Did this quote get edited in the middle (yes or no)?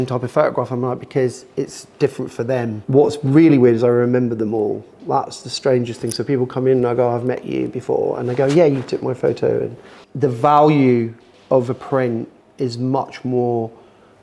yes